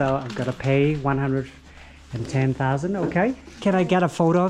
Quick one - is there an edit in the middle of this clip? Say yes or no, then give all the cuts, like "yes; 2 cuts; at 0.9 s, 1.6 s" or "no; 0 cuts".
yes; 1 cut; at 3.6 s